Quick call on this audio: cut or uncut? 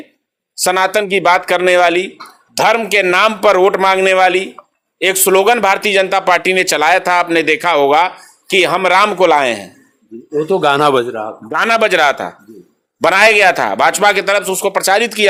uncut